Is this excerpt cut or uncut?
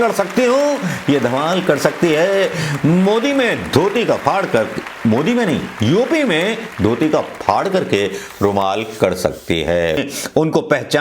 cut